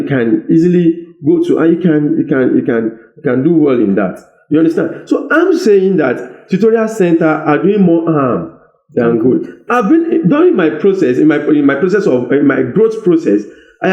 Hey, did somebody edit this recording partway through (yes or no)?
no